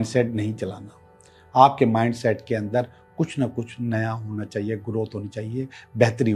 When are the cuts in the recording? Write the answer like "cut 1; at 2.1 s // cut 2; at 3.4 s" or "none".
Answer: none

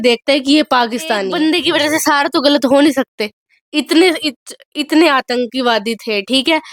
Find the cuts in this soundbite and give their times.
cut 1; at 1.3 s

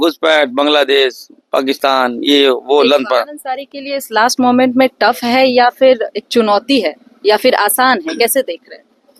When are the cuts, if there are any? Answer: none

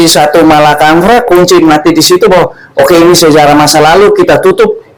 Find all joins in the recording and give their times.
none

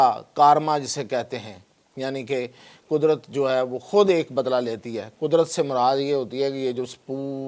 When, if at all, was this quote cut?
none

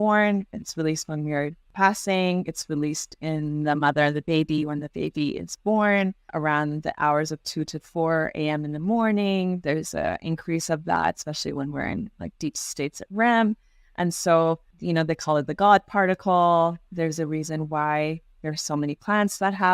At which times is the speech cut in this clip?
cut 1; at 1.6 s // cut 2; at 6.3 s // cut 3; at 14.7 s

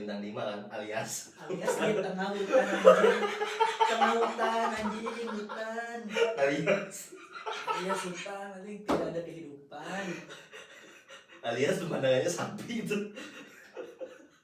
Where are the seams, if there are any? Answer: none

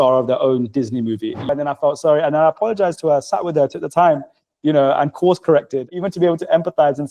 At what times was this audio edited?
cut 1; at 1.5 s // cut 2; at 5.9 s

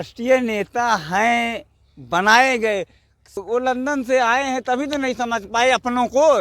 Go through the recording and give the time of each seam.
cut 1; at 3.4 s

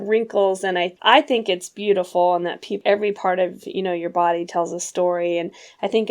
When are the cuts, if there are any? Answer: cut 1; at 0.9 s // cut 2; at 2.8 s

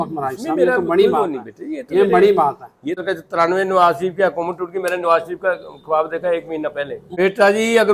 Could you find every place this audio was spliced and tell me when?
cut 1; at 3.0 s // cut 2; at 7.0 s

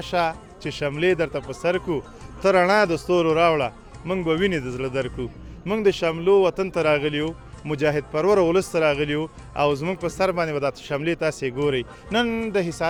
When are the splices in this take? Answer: none

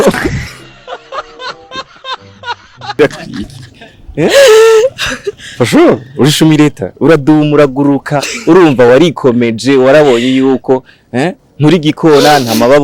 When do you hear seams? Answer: none

